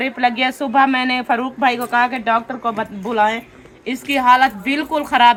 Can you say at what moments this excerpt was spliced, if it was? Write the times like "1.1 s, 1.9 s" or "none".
none

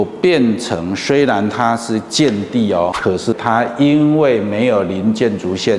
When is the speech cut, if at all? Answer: 3.3 s

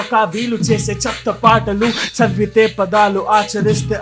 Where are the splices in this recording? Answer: 2.0 s

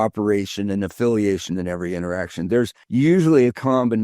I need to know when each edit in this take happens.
2.8 s

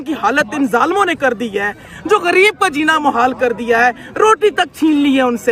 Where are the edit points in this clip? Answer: none

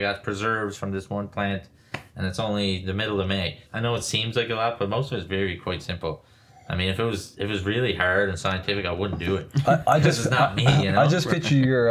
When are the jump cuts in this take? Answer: 3.6 s

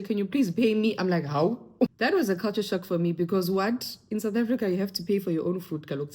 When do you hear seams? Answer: 1.9 s

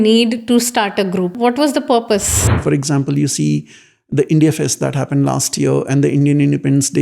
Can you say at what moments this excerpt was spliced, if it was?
1.3 s, 2.5 s

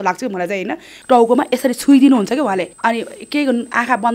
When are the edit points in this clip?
0.9 s, 2.7 s

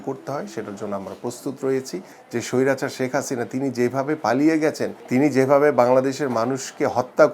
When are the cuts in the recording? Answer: 2.2 s, 4.9 s

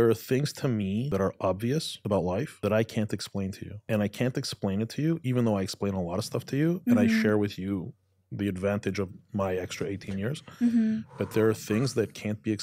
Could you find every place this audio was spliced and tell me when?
1.1 s, 2.4 s, 3.7 s

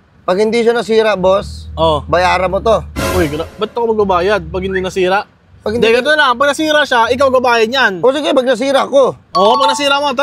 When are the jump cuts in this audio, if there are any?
none

